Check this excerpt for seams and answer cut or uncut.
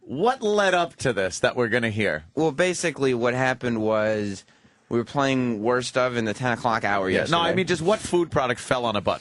uncut